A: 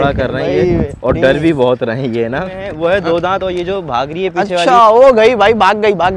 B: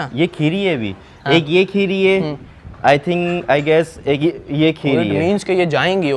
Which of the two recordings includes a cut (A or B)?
A